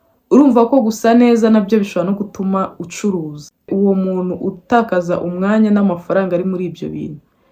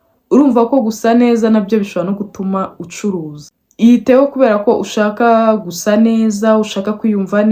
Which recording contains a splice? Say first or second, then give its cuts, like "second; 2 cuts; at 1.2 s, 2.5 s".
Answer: first; 1 cut; at 3.7 s